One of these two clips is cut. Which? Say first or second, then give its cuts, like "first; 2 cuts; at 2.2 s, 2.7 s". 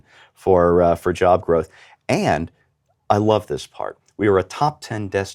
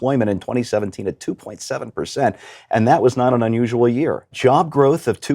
second; 1 cut; at 4.3 s